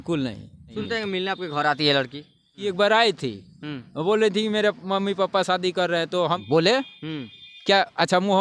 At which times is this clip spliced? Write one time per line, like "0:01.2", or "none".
0:00.8
0:02.6
0:06.4